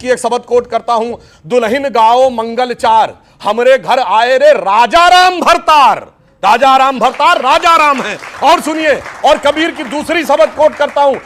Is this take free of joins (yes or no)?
yes